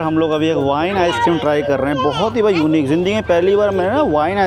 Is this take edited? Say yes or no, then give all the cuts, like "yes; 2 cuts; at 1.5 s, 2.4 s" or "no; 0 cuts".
no; 0 cuts